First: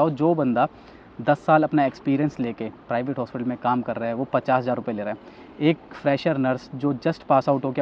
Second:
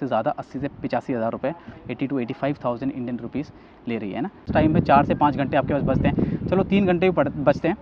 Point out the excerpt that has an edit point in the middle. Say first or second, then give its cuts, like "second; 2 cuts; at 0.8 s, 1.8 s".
second; 1 cut; at 4.5 s